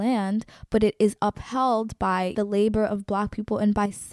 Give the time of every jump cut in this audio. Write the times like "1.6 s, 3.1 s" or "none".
2.3 s